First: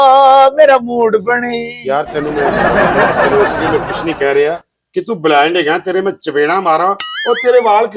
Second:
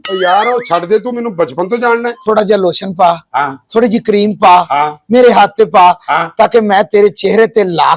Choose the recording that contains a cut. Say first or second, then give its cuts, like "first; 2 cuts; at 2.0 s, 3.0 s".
second; 1 cut; at 2.1 s